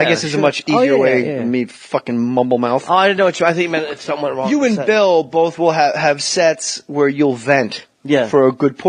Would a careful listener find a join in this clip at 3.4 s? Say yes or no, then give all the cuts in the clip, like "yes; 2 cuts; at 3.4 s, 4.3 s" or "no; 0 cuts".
yes; 1 cut; at 3.4 s